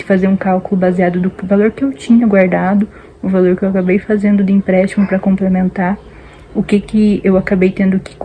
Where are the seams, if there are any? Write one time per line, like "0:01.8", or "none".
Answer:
none

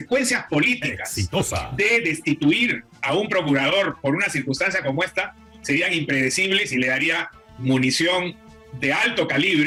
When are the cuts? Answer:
none

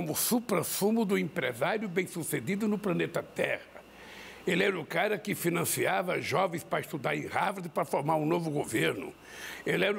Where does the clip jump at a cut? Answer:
none

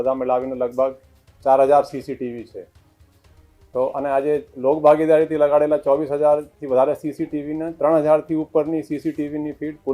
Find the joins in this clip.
none

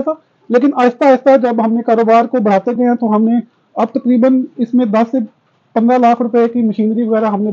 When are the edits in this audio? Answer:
none

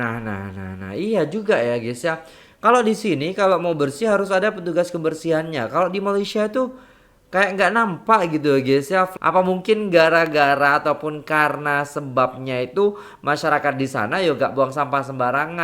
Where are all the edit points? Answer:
0:09.1

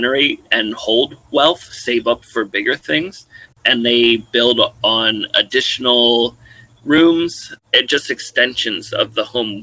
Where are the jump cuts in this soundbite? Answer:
0:03.2
0:07.5

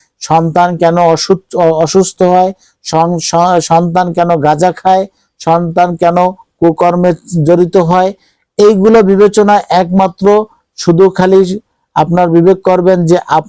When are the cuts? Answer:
none

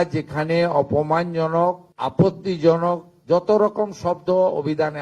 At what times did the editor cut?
0:01.9

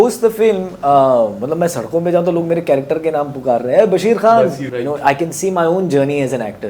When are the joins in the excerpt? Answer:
0:04.7

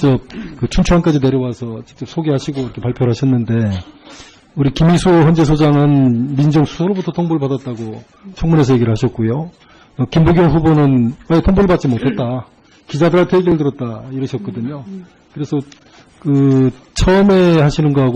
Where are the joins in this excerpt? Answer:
0:12.3

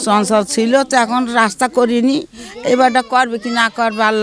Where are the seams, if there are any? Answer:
none

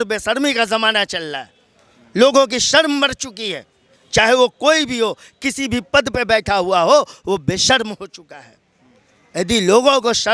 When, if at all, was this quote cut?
none

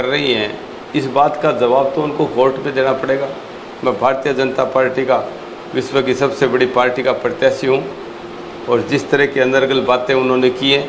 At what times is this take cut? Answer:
none

